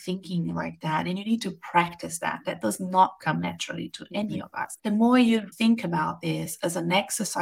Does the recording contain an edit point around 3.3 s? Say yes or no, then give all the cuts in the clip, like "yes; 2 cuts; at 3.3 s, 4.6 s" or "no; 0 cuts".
no; 2 cuts; at 4.7 s, 5.5 s